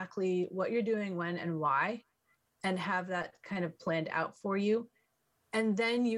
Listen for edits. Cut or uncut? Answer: uncut